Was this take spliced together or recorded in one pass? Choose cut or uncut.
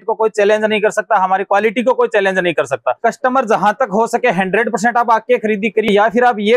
cut